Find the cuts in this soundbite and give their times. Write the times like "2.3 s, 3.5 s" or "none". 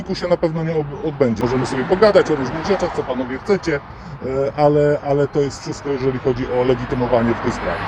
1.4 s